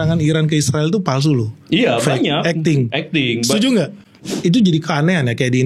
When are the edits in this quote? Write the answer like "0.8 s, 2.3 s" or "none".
4.1 s